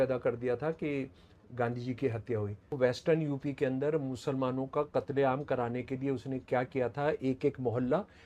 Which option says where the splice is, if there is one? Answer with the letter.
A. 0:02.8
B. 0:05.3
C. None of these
A